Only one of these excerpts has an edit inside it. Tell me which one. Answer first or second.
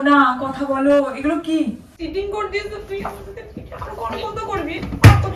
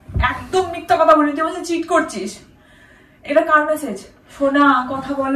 first